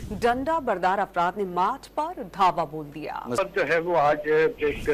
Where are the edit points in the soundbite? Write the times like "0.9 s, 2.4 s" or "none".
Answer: none

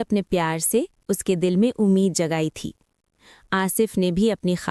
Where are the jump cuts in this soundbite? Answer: none

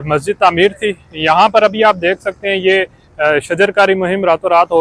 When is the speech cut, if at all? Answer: none

